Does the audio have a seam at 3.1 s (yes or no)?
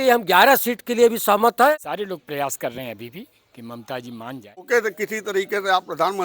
no